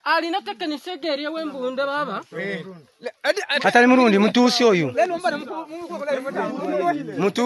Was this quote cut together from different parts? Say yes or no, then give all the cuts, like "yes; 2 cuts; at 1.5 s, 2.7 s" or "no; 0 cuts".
no; 0 cuts